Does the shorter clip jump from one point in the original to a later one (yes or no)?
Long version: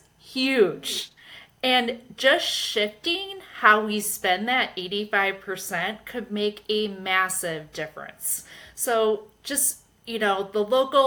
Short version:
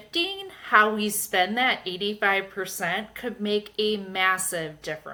no